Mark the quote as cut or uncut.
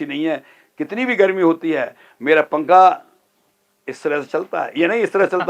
uncut